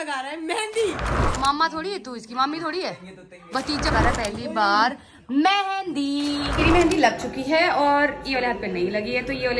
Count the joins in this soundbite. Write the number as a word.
two